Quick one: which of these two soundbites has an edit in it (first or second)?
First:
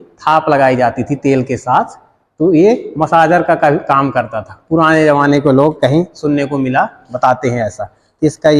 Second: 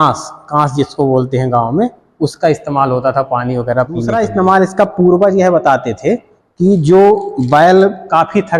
second